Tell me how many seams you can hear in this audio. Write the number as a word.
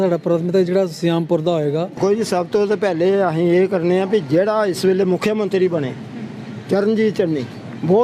one